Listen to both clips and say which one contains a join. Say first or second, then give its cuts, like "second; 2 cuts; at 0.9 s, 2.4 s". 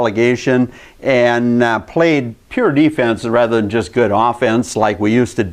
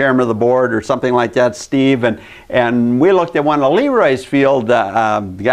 second; 1 cut; at 4.6 s